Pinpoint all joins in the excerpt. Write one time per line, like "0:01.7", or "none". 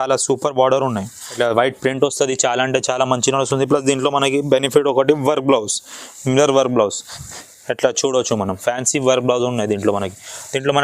0:01.2

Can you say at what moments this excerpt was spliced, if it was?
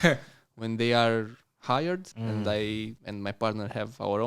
0:02.1
0:03.0

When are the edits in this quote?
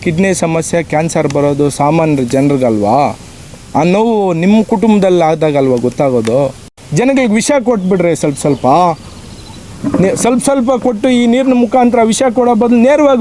0:06.6

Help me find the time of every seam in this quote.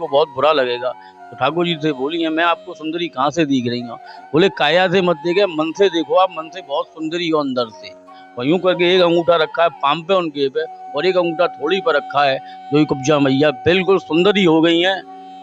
none

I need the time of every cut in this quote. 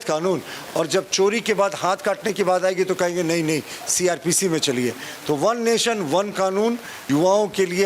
0:06.9

